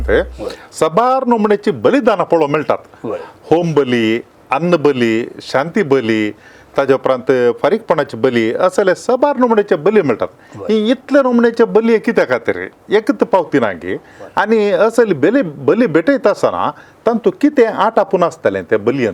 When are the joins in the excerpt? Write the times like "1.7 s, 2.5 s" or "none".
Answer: none